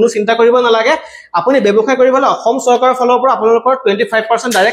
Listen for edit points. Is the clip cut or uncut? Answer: uncut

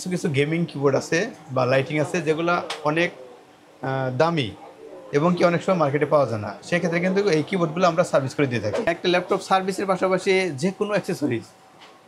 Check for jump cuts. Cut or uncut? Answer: cut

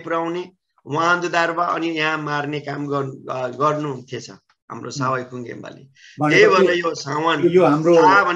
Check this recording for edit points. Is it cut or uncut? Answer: uncut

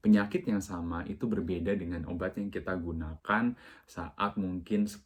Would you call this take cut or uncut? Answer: uncut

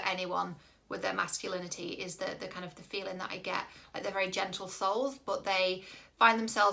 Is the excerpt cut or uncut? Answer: uncut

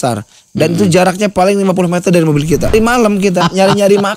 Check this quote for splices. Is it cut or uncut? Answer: cut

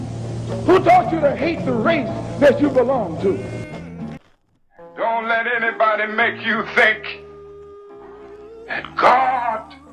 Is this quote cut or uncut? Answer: cut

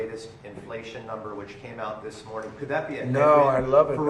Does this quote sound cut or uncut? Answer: uncut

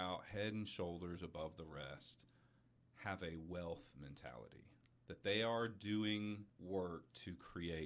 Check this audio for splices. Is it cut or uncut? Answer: uncut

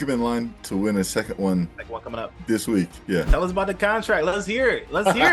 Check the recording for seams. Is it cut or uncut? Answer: cut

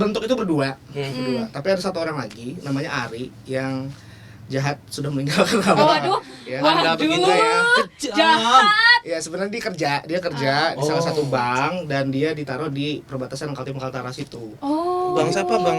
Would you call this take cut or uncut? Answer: uncut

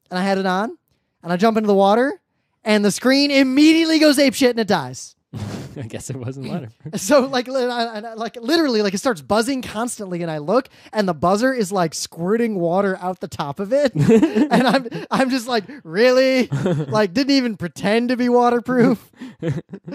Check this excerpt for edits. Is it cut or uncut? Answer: cut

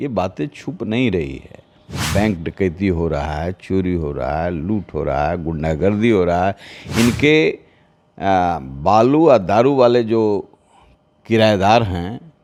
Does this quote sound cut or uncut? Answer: uncut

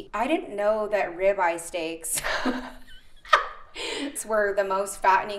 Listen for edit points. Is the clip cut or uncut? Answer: cut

